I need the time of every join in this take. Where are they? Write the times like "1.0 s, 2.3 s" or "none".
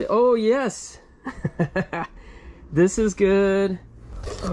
none